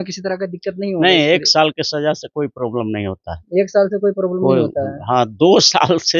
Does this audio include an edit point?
no; 0 cuts

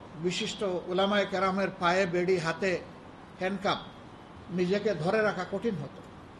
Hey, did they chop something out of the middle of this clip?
no; 0 cuts

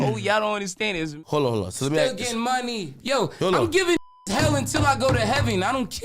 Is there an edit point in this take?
yes; 1 cut; at 1.2 s

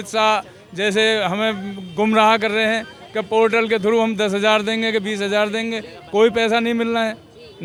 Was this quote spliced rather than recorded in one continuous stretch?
no; 0 cuts

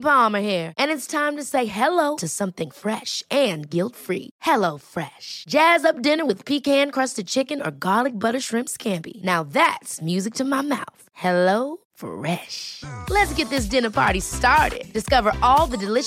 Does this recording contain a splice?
no; 0 cuts

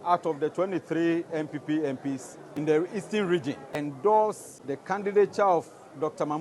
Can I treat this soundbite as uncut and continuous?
no; 3 cuts; at 2.4 s, 3.7 s, 5.0 s

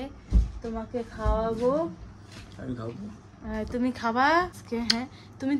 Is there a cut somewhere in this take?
yes; 1 cut; at 4.6 s

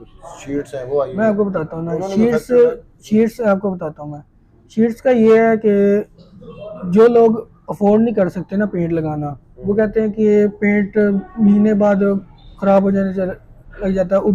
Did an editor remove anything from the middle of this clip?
no; 0 cuts

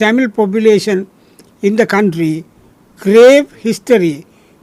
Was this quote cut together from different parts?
no; 0 cuts

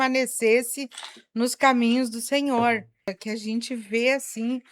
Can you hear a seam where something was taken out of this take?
yes; 1 cut; at 3.2 s

